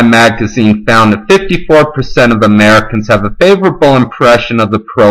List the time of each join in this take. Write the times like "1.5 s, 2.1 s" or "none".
2.1 s